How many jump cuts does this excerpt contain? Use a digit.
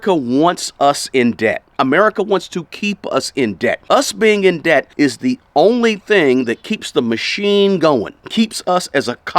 3